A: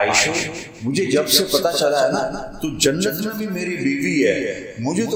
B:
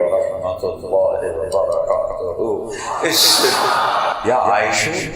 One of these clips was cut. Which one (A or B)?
B